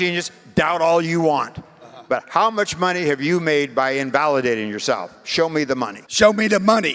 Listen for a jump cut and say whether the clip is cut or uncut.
cut